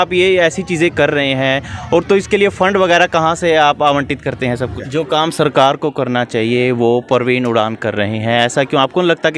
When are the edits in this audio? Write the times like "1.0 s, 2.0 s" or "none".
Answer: 4.8 s